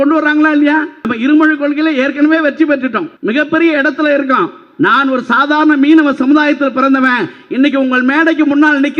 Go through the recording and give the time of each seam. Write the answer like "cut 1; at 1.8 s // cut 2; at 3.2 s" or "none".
cut 1; at 1.0 s // cut 2; at 3.1 s